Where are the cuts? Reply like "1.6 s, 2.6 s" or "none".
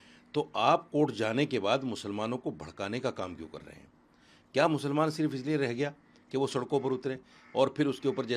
none